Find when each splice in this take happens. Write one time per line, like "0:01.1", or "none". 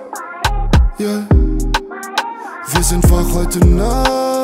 none